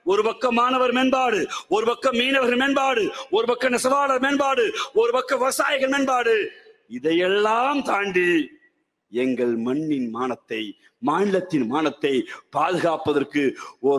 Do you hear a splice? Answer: no; 0 cuts

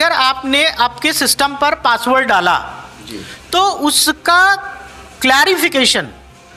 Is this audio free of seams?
yes; 0 cuts

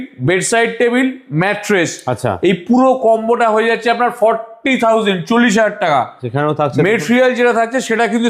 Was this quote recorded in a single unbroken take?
yes; 0 cuts

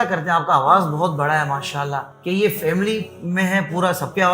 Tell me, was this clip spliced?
yes; 1 cut; at 2.1 s

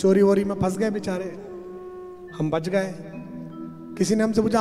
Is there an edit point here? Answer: no; 0 cuts

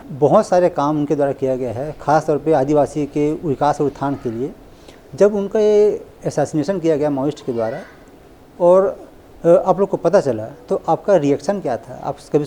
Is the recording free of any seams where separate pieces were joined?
yes; 0 cuts

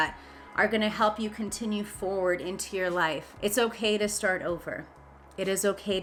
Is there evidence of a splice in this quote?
no; 0 cuts

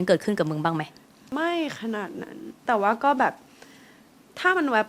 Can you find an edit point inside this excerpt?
yes; 2 cuts; at 1.3 s, 2.6 s

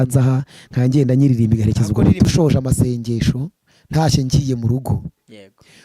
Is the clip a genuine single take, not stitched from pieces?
no; 1 cut; at 2.3 s

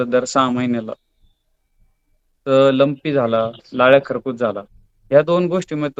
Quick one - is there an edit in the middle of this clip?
no; 0 cuts

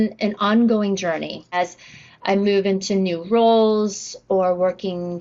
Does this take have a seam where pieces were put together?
yes; 1 cut; at 1.5 s

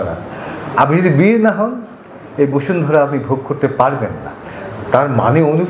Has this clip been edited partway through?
no; 0 cuts

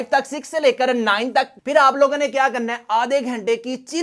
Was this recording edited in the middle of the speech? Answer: yes; 1 cut; at 1.5 s

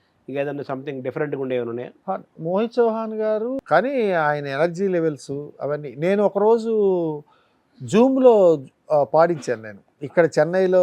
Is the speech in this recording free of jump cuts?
no; 2 cuts; at 1.9 s, 3.6 s

